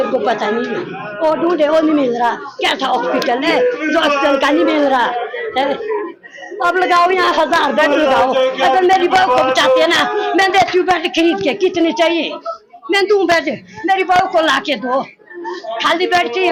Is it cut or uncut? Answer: uncut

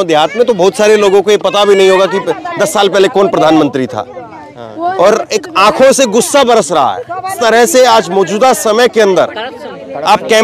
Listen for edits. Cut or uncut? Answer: cut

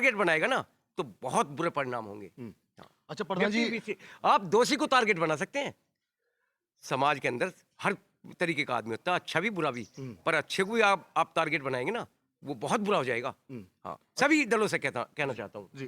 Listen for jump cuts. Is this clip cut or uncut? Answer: uncut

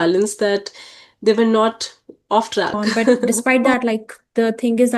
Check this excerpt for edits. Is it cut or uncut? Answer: cut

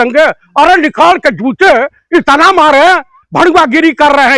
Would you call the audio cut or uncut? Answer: uncut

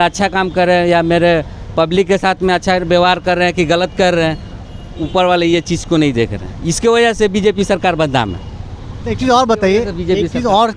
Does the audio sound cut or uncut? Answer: uncut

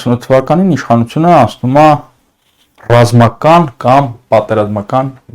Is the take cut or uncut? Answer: uncut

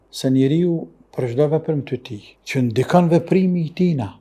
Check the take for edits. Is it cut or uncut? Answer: uncut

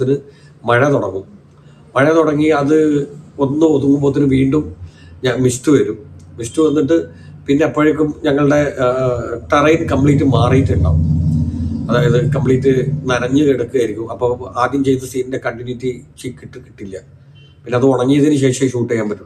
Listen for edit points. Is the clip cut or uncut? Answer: uncut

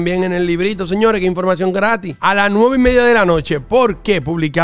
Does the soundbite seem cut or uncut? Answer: uncut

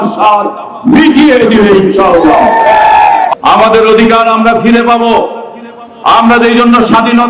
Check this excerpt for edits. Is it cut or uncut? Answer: cut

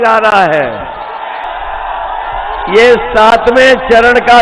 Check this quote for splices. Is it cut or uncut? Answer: uncut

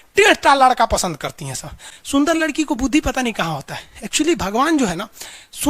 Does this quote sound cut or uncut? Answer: uncut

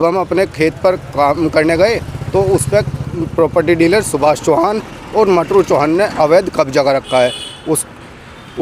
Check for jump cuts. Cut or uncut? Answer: uncut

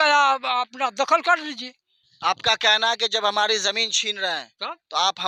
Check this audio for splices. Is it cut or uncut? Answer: uncut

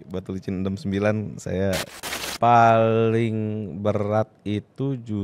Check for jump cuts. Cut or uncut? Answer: cut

